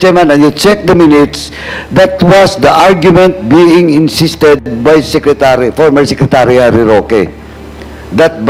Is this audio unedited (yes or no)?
yes